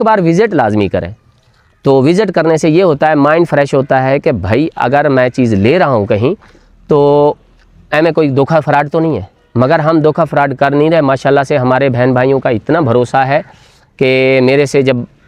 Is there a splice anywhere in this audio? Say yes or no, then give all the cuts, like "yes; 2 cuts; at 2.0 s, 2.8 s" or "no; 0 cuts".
no; 0 cuts